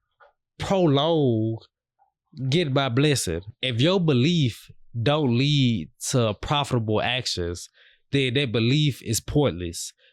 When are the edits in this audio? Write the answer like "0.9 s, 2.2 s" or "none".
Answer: 3.5 s